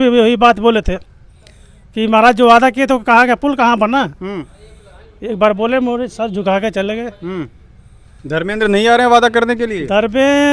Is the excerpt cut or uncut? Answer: uncut